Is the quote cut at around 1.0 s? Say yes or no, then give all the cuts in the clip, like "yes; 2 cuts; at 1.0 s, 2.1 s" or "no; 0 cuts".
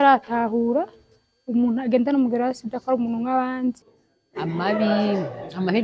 no; 1 cut; at 3.9 s